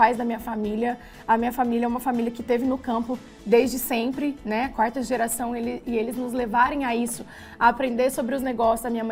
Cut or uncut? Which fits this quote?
uncut